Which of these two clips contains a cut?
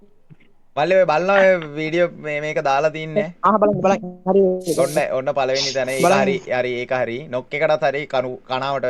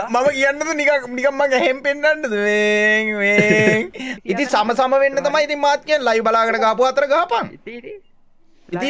second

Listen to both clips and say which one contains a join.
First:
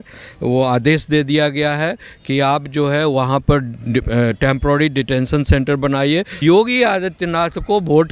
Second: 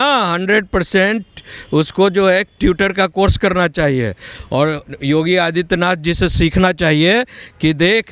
first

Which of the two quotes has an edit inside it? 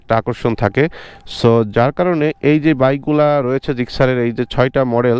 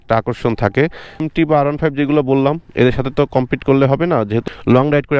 second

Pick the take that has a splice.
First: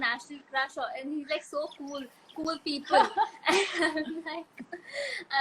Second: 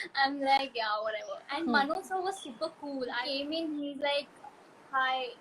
second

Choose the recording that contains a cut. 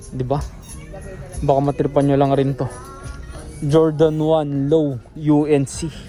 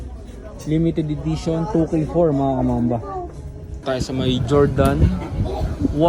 second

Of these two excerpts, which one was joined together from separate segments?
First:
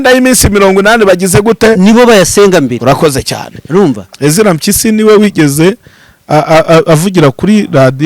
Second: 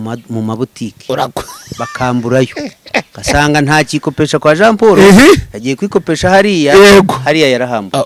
first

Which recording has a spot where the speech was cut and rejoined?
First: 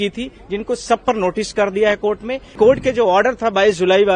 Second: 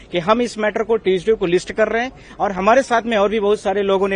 first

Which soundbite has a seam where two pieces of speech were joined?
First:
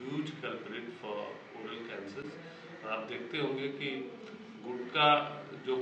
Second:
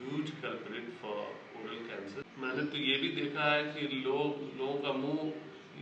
second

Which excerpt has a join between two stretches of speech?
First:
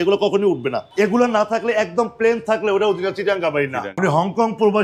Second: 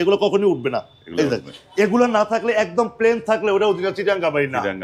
first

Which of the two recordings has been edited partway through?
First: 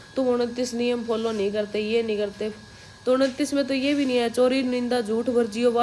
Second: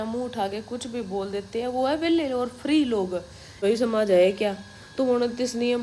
second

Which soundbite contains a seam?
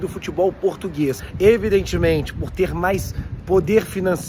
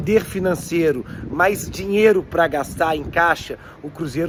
first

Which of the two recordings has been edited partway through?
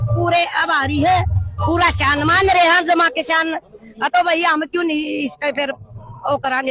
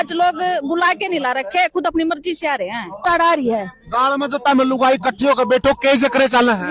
second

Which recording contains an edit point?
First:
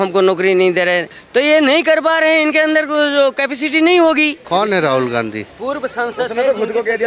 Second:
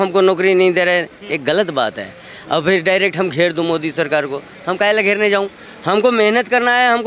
first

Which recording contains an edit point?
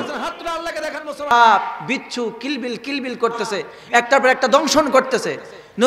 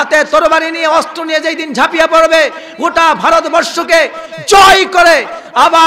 first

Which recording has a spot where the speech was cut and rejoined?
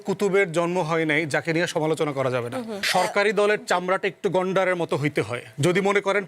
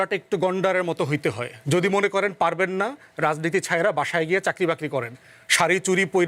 first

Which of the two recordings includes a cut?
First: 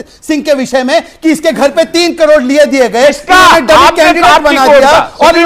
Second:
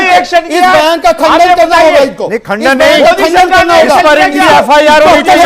second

